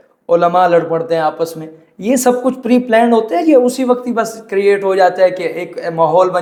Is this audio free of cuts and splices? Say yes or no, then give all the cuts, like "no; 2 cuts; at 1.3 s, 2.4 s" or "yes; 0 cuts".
yes; 0 cuts